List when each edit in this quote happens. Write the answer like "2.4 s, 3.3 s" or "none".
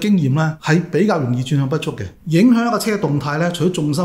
2.0 s